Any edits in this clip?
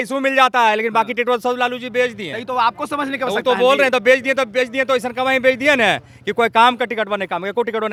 no; 0 cuts

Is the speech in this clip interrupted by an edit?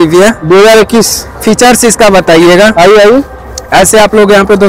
no; 0 cuts

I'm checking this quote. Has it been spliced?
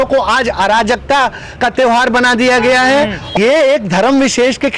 yes; 1 cut; at 3.2 s

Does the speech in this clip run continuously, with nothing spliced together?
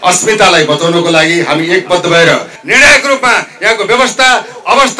no; 1 cut; at 2.6 s

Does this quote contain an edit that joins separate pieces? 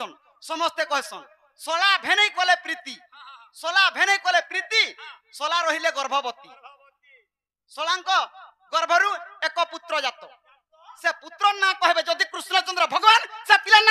no; 0 cuts

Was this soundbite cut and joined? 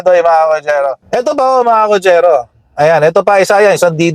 yes; 1 cut; at 1.0 s

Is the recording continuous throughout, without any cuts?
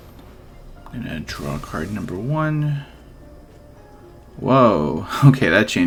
yes; 0 cuts

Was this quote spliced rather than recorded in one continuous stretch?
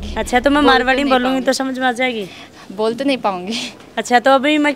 no; 0 cuts

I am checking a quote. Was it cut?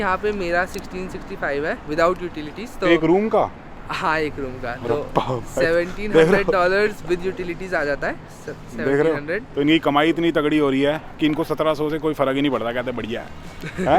no; 0 cuts

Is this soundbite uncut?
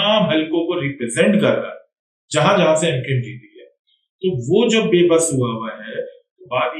yes; 0 cuts

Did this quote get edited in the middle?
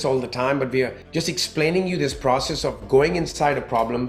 yes; 1 cut; at 1.0 s

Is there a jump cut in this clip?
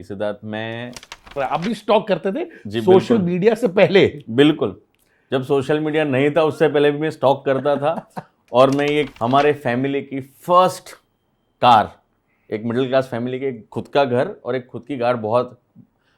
yes; 2 cuts; at 1.4 s, 9.1 s

